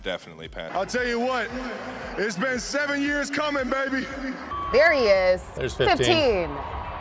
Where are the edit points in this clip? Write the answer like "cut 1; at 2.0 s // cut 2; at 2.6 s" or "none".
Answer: cut 1; at 4.5 s